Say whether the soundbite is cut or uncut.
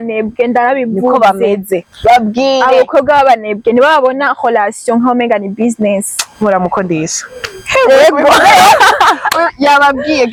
uncut